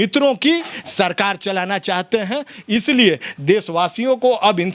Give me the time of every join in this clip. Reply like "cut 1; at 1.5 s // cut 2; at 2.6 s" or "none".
none